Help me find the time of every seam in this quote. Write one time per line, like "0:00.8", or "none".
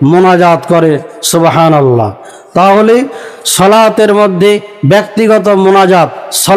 none